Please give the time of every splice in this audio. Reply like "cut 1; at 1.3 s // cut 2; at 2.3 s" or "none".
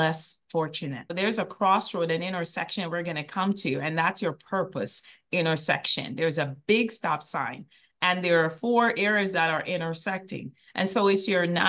cut 1; at 1.1 s